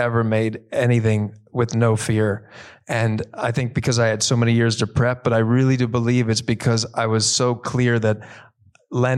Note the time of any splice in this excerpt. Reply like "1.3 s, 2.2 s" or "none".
none